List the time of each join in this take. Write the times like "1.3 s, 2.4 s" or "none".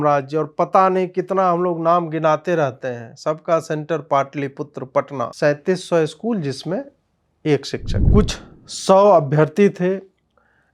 5.3 s, 7.9 s